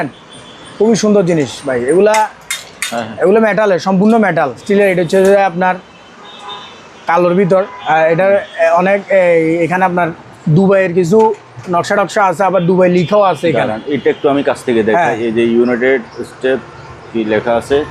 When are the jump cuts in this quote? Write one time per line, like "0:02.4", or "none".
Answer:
0:04.6